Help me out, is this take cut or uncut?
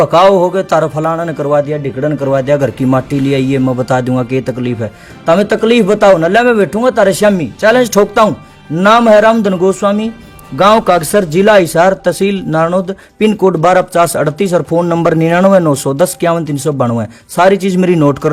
uncut